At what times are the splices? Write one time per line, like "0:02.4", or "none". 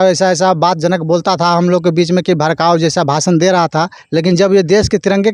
0:04.0